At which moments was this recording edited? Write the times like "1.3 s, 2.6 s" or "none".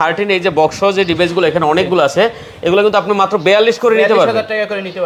none